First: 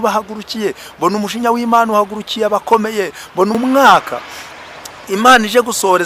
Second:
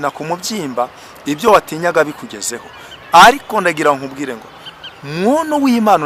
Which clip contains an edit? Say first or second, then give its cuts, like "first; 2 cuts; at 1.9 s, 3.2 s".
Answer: first; 1 cut; at 3.5 s